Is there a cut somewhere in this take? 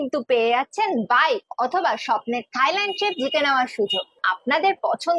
yes; 1 cut; at 4.2 s

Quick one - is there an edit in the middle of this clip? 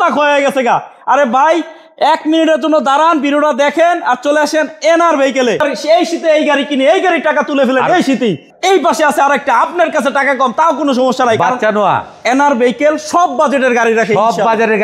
yes; 2 cuts; at 5.6 s, 8.5 s

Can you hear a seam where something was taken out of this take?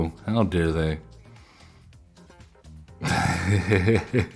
yes; 1 cut; at 1.7 s

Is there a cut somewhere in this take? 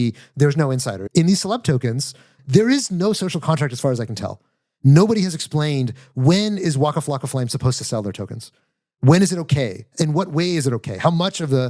yes; 2 cuts; at 1.0 s, 2.3 s

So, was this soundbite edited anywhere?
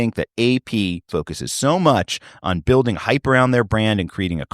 yes; 1 cut; at 1.1 s

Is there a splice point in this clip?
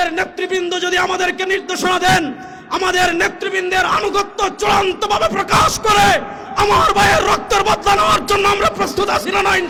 no; 0 cuts

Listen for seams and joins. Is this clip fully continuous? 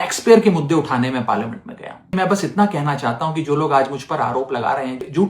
no; 1 cut; at 2.1 s

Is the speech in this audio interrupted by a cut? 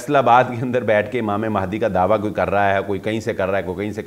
no; 0 cuts

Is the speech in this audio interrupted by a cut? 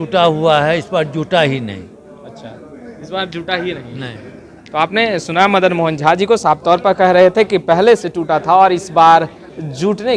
no; 0 cuts

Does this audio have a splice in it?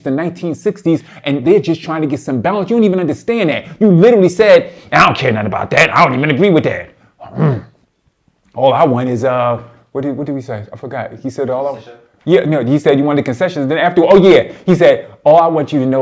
no; 0 cuts

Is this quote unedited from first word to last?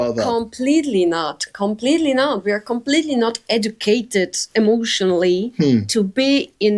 yes; 0 cuts

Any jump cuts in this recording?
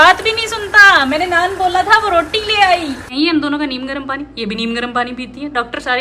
yes; 1 cut; at 3.1 s

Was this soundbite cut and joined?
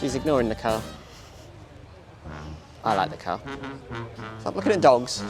no; 0 cuts

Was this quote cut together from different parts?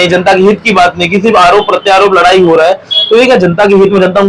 no; 0 cuts

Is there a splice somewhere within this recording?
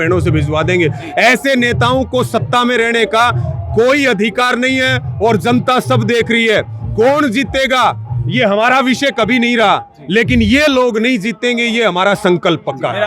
no; 0 cuts

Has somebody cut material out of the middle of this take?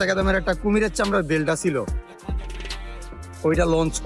no; 0 cuts

